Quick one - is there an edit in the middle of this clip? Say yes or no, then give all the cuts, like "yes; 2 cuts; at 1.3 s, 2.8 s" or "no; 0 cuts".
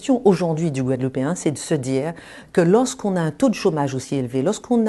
no; 0 cuts